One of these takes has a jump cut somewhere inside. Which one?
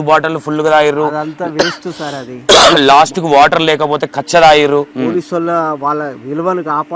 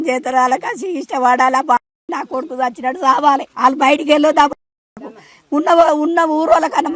first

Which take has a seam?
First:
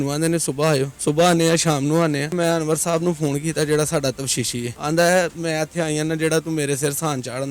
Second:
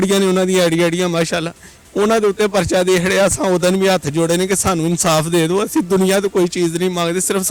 first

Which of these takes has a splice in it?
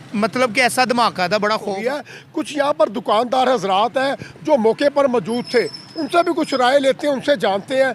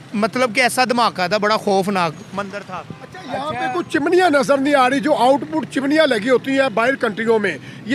first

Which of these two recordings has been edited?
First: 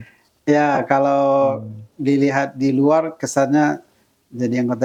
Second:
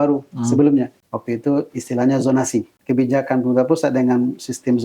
second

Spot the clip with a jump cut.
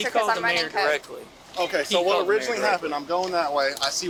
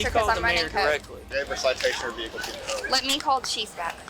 second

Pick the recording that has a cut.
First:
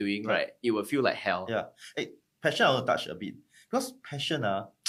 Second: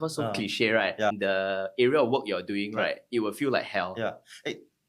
second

